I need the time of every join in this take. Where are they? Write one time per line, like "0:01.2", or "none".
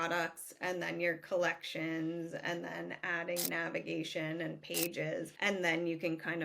0:05.3